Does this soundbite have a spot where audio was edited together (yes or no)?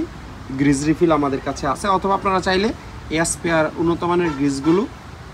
no